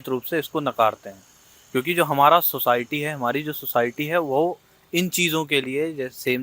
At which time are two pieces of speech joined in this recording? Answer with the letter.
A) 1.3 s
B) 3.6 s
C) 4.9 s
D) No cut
D